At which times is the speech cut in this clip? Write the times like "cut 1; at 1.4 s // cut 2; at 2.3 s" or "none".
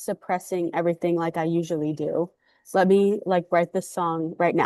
none